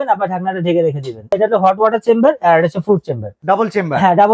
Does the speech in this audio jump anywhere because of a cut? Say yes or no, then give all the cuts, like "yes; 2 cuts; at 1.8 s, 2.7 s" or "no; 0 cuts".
yes; 2 cuts; at 1.3 s, 3.3 s